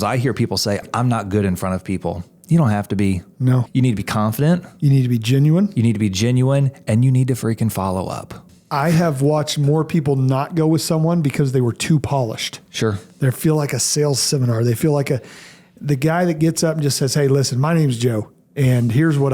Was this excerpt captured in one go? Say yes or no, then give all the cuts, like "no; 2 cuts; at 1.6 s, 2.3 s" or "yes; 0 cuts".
no; 3 cuts; at 0.9 s, 3.6 s, 8.4 s